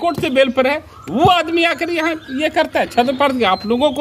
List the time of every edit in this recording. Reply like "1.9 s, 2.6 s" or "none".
none